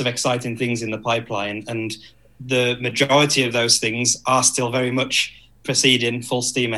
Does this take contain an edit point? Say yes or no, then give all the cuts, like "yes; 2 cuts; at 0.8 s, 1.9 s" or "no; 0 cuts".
no; 0 cuts